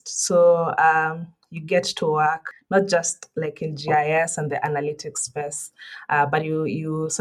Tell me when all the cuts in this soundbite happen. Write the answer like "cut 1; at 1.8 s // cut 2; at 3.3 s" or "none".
cut 1; at 2.5 s